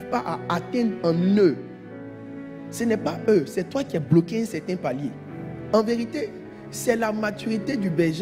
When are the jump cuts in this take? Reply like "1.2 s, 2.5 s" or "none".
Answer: 5.7 s